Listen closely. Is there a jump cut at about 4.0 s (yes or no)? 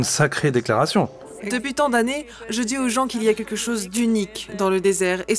no